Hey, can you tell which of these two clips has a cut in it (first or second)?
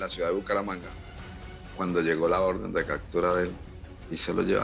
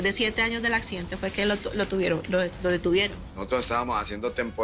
second